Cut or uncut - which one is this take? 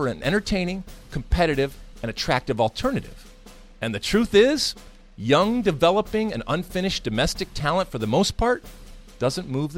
uncut